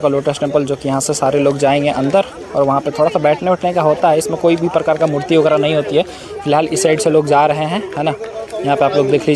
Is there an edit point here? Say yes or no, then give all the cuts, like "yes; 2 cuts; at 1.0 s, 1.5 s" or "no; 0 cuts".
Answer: no; 0 cuts